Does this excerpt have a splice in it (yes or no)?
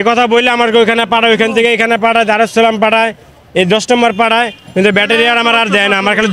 no